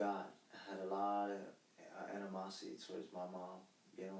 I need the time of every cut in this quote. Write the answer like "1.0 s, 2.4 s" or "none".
none